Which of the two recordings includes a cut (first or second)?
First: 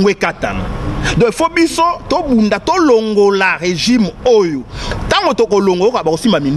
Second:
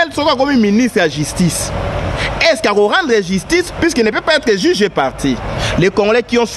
second